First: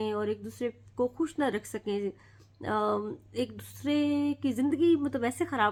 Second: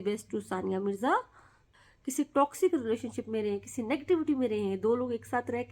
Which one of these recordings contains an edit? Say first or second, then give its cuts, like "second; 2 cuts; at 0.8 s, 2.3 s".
second; 1 cut; at 1.7 s